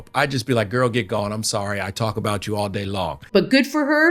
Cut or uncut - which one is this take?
cut